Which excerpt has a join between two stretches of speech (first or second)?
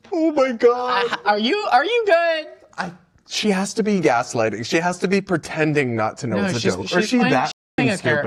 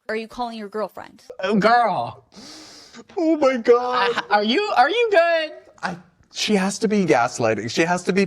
second